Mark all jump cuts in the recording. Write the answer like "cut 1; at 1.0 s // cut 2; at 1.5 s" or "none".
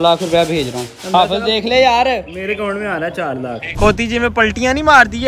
cut 1; at 3.7 s